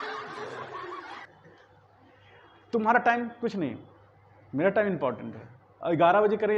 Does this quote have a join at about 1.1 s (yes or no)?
no